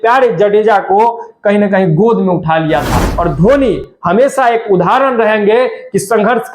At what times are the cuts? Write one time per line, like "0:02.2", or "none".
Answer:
0:03.1